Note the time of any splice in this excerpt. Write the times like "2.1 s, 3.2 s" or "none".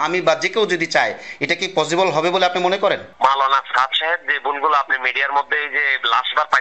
none